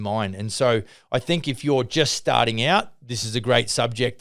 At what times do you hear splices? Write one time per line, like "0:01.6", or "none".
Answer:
none